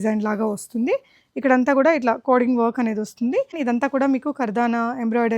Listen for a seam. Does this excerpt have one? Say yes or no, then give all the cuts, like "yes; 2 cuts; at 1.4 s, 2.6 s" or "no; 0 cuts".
yes; 1 cut; at 3.6 s